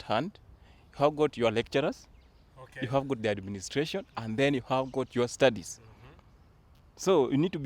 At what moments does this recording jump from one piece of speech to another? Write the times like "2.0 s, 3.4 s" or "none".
none